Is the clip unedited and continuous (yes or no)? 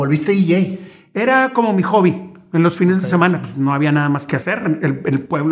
yes